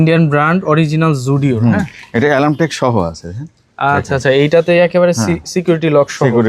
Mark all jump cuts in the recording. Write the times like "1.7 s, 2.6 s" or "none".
none